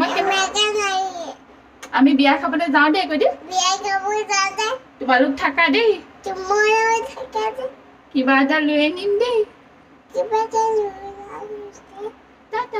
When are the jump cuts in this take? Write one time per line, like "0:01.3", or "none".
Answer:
0:01.4